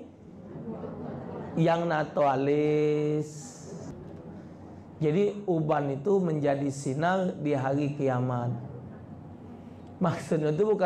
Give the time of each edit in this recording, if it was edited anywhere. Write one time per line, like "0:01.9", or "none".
0:03.9